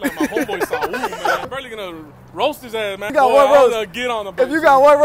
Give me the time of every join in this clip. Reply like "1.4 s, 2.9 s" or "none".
1.5 s, 3.1 s